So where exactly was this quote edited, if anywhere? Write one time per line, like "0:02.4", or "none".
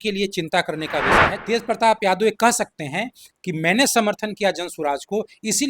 0:01.3